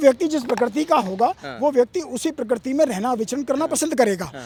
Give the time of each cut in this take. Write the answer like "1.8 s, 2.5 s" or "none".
none

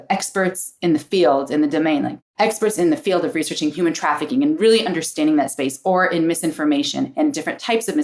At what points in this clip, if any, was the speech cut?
2.2 s

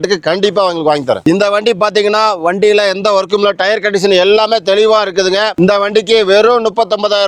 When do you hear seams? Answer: 1.2 s

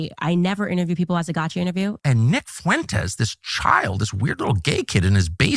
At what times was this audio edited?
2.0 s

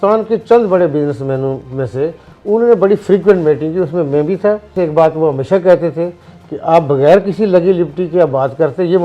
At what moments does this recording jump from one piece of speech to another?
4.7 s

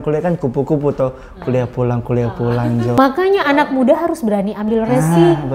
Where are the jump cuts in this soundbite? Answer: 2.9 s

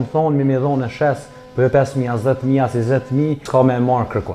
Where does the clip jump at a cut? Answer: 3.4 s

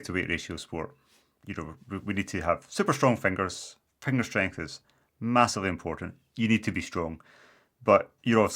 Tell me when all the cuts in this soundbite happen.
none

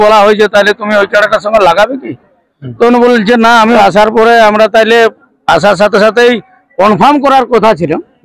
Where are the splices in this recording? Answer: 3.8 s

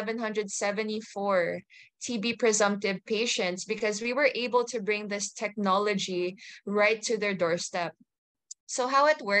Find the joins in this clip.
none

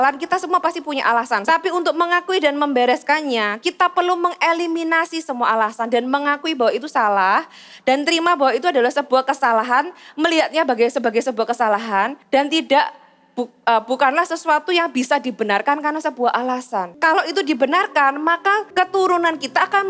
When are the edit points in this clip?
1.4 s, 12.2 s, 16.9 s, 18.7 s

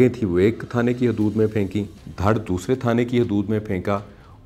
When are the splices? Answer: 2.0 s

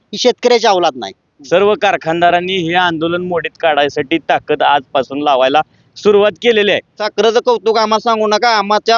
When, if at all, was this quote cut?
1.3 s, 7.0 s

